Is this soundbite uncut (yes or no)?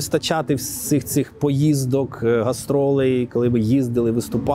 yes